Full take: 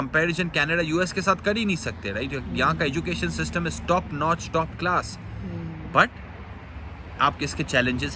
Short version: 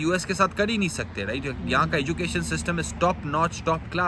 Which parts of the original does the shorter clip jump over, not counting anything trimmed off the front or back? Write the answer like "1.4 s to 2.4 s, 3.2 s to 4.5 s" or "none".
none